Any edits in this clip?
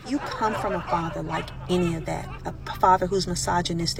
no; 0 cuts

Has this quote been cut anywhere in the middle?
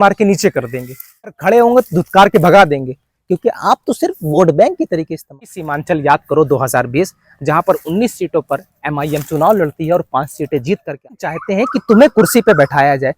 yes; 3 cuts; at 1.3 s, 5.6 s, 11.4 s

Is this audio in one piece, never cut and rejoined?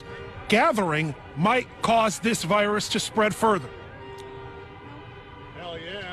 yes; 0 cuts

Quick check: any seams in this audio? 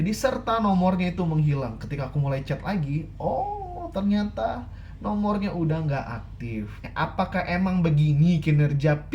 yes; 1 cut; at 6.8 s

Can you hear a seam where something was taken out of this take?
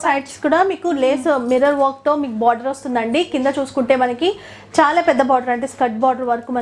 no; 0 cuts

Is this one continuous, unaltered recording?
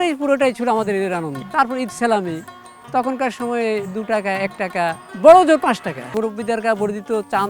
no; 3 cuts; at 1.4 s, 5.1 s, 6.1 s

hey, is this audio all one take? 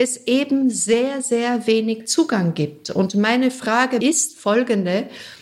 no; 1 cut; at 4.0 s

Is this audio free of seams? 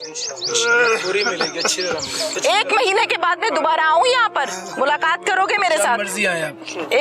no; 1 cut; at 2.3 s

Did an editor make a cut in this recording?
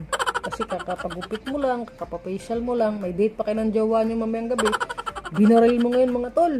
no; 0 cuts

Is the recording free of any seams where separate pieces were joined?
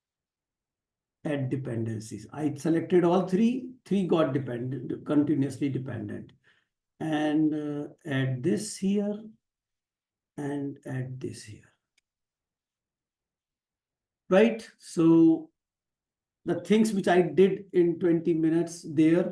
yes; 0 cuts

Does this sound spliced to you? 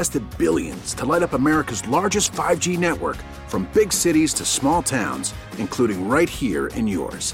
no; 0 cuts

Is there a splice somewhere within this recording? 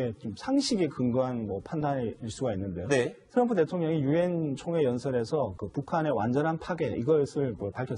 no; 0 cuts

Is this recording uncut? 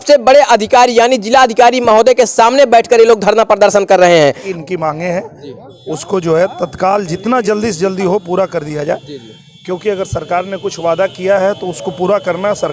no; 1 cut; at 4.5 s

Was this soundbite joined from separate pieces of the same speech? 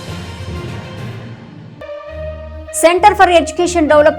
no; 0 cuts

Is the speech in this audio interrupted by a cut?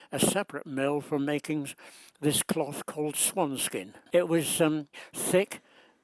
yes; 2 cuts; at 4.0 s, 4.9 s

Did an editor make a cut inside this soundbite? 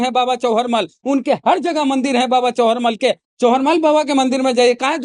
yes; 1 cut; at 3.2 s

